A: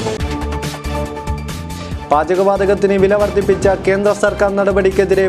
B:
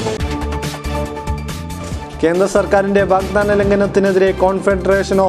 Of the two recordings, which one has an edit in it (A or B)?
A